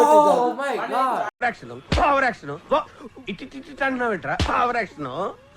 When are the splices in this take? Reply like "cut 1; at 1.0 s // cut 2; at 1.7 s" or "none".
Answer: cut 1; at 1.3 s